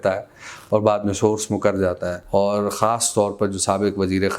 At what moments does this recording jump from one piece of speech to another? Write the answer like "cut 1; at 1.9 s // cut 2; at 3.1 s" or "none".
cut 1; at 2.2 s